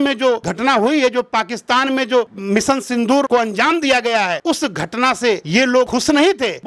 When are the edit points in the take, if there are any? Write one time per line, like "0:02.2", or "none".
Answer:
none